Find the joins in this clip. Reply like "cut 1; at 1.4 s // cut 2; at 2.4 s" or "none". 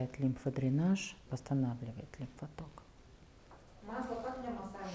cut 1; at 1.2 s // cut 2; at 3.6 s